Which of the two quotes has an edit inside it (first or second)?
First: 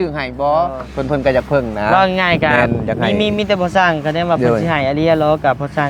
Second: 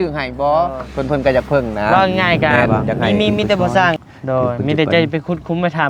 second